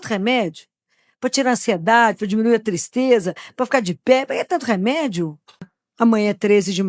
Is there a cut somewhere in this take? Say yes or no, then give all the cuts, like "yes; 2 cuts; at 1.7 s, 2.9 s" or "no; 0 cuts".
yes; 1 cut; at 5.8 s